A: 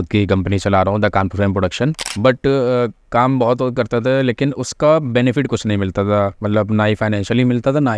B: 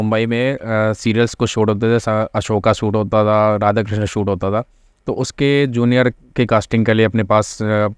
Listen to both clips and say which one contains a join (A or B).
A